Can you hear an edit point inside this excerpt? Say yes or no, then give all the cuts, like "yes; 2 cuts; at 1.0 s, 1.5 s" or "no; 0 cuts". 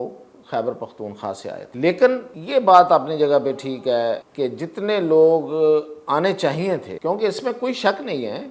yes; 4 cuts; at 1.7 s, 2.3 s, 4.3 s, 6.9 s